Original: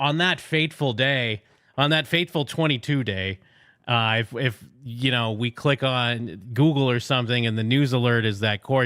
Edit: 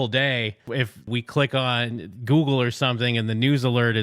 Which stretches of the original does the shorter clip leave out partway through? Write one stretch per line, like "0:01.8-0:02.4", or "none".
0:01.8-0:05.2